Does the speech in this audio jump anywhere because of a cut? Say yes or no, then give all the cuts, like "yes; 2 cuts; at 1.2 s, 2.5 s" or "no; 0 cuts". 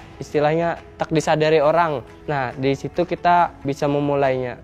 yes; 2 cuts; at 2.1 s, 3.6 s